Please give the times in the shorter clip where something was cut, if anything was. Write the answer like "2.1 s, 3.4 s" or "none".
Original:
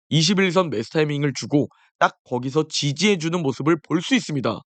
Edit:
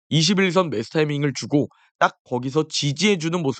none